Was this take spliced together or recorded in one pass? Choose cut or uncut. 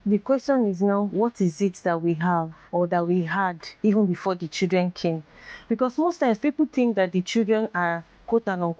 uncut